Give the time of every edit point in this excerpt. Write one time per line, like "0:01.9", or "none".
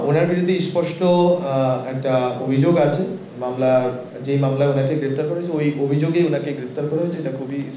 none